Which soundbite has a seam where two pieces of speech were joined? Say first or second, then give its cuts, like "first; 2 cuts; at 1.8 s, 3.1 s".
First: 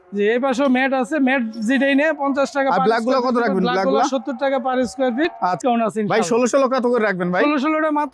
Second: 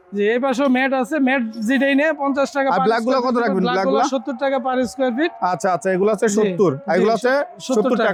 first; 1 cut; at 5.6 s